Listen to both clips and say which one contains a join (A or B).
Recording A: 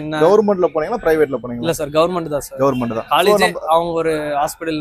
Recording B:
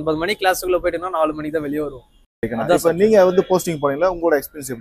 B